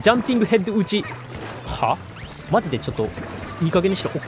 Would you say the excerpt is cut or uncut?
uncut